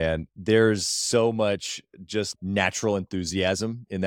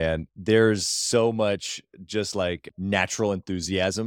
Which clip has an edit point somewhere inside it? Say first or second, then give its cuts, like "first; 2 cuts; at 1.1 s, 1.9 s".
first; 1 cut; at 2.3 s